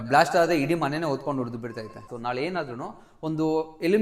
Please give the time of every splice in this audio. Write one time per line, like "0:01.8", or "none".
0:02.1